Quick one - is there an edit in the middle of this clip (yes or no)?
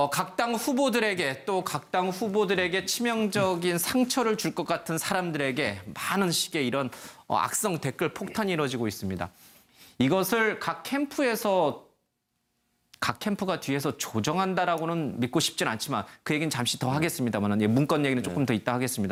no